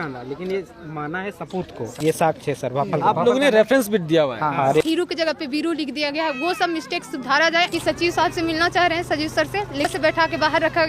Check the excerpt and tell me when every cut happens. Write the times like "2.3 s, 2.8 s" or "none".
1.9 s, 4.8 s, 7.7 s, 9.9 s